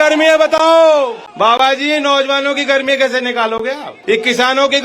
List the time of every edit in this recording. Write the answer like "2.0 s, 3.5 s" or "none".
1.2 s, 3.9 s